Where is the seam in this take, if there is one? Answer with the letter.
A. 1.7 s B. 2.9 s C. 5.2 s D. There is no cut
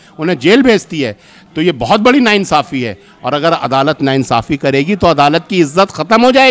D